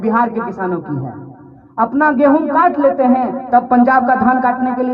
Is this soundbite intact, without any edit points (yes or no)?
yes